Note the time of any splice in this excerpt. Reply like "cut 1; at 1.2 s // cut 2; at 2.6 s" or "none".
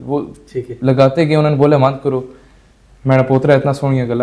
none